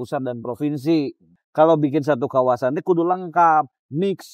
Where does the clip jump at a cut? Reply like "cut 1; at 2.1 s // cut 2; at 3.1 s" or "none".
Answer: cut 1; at 1.4 s

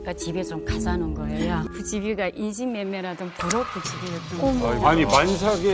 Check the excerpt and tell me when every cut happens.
cut 1; at 1.7 s

